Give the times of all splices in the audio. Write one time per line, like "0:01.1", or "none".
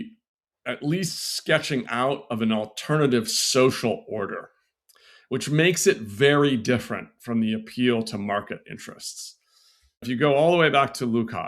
0:10.0